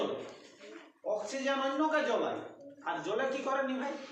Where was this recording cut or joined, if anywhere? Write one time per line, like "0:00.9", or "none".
none